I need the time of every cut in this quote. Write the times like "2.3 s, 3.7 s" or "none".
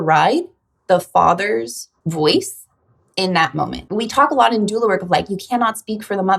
1.9 s, 3.8 s

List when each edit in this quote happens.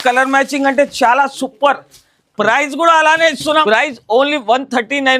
3.6 s

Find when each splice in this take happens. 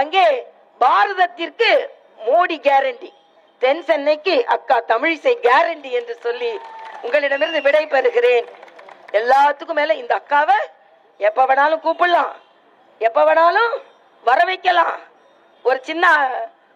none

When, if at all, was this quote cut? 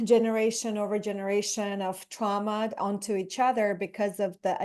none

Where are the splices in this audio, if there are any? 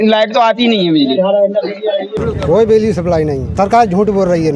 2.1 s, 3.5 s

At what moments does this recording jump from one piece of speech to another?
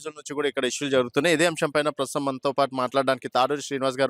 none

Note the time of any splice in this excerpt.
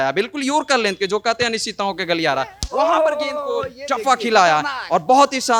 none

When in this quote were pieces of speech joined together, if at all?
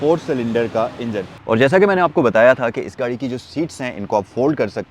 1.3 s

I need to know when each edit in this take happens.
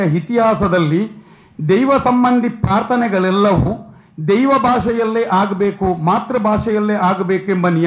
none

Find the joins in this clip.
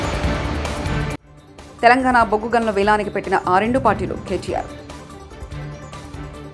none

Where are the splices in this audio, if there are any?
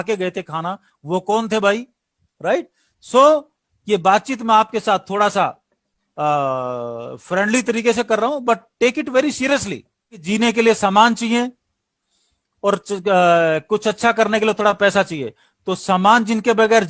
10.3 s

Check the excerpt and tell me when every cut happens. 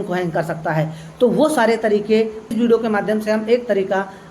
2.5 s

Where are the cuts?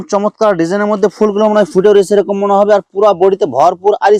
none

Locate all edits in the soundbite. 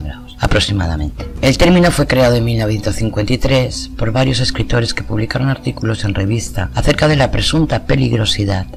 none

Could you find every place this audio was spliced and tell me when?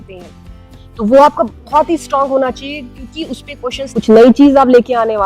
3.8 s

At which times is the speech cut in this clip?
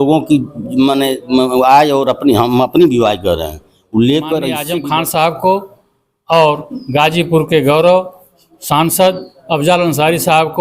4.6 s

